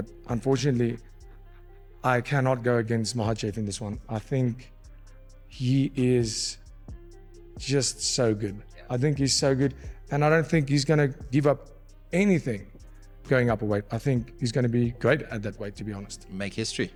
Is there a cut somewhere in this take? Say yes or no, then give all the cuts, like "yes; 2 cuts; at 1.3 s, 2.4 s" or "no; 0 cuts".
no; 0 cuts